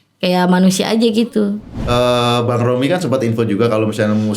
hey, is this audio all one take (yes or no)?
no